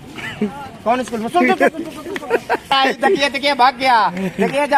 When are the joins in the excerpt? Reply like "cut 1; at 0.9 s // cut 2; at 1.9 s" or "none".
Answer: none